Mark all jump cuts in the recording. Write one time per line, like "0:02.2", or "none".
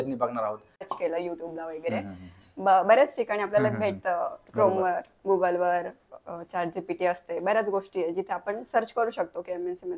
0:00.9